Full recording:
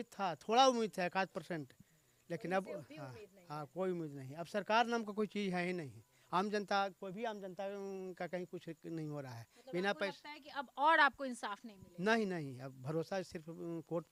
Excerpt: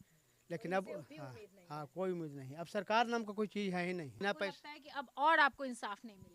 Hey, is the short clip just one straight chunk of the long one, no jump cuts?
no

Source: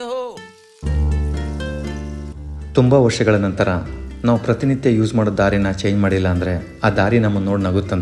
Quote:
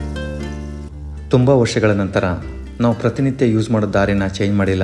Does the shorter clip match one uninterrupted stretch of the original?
yes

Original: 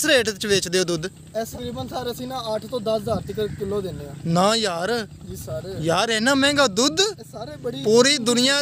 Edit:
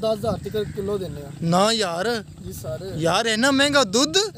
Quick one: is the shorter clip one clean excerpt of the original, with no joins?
yes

